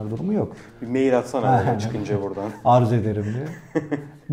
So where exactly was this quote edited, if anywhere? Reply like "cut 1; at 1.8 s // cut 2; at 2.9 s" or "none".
none